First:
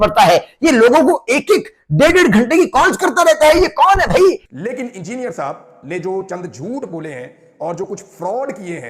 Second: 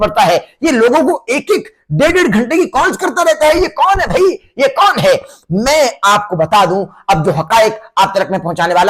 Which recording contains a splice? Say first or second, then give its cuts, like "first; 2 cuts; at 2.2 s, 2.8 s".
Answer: first; 1 cut; at 4.5 s